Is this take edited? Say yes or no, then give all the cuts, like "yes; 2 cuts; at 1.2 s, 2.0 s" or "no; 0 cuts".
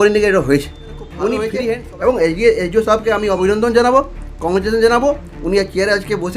yes; 1 cut; at 1.6 s